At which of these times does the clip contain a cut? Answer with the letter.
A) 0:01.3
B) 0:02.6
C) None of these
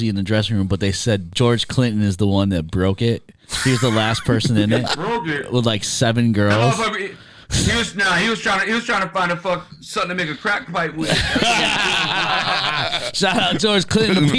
A